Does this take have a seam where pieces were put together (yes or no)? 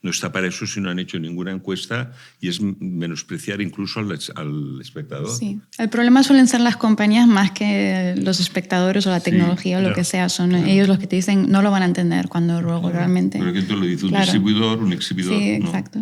no